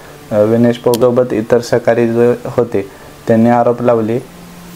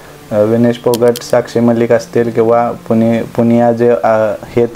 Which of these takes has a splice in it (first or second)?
first